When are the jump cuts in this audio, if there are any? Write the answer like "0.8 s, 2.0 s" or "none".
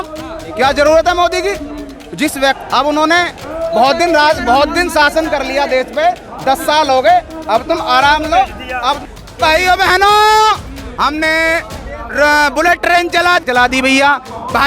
9.1 s, 13.4 s